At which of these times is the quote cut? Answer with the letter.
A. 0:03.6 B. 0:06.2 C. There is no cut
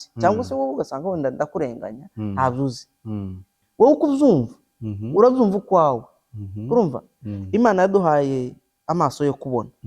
A